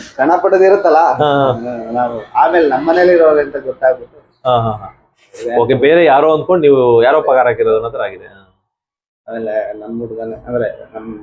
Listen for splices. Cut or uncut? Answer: uncut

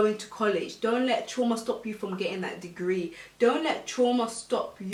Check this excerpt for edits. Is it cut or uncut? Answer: uncut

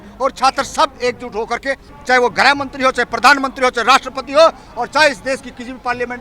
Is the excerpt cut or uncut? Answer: cut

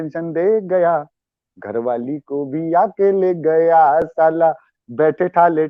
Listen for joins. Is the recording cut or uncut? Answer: uncut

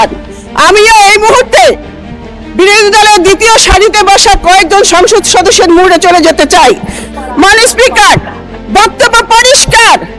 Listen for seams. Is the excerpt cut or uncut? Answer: cut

